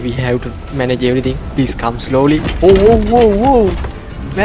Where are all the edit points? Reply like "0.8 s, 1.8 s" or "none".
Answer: 1.4 s